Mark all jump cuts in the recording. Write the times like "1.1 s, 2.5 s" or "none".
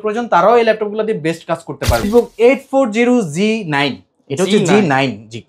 2.0 s